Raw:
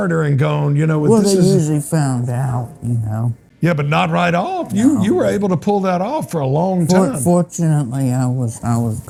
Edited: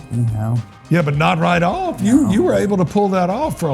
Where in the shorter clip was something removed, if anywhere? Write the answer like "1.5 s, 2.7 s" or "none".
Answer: none